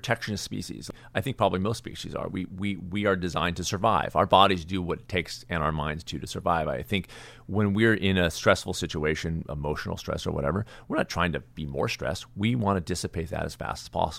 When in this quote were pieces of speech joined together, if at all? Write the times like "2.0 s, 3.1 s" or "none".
0.9 s